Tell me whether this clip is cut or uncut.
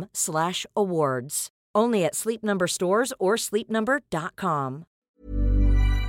cut